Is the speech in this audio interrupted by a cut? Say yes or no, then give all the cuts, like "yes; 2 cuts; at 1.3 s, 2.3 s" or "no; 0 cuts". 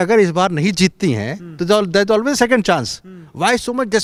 no; 0 cuts